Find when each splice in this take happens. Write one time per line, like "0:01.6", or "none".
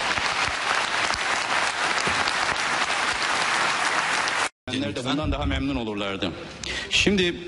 0:06.6

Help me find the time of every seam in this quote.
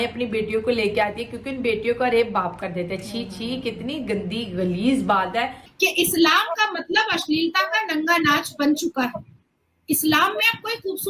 0:05.6

